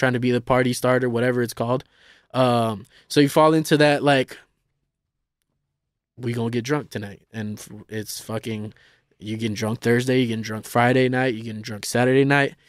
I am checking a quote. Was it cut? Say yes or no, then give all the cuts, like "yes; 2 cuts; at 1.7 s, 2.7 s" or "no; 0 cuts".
no; 0 cuts